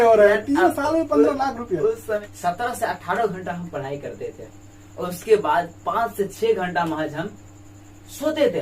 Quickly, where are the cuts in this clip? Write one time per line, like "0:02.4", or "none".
0:02.2